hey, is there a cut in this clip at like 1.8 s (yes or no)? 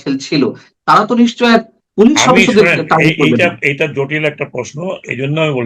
yes